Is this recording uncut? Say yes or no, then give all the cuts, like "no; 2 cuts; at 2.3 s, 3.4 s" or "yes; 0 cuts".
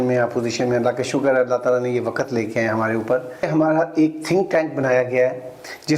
no; 1 cut; at 3.5 s